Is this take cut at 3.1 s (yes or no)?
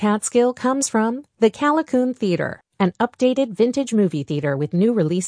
no